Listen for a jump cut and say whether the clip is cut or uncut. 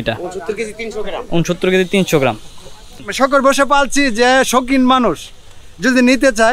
cut